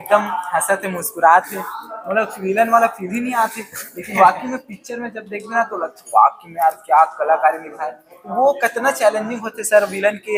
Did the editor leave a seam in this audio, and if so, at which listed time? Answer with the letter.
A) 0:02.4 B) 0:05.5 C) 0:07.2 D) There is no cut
D